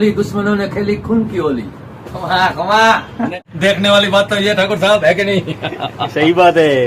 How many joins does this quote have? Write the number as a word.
one